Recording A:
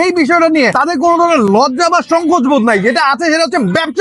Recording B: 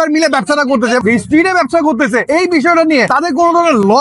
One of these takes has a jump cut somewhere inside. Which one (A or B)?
B